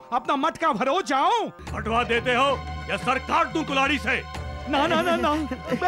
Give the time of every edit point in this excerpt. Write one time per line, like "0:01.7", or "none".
0:01.6